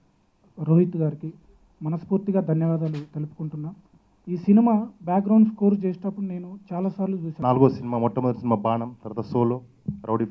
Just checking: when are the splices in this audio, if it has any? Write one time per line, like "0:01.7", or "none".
0:07.3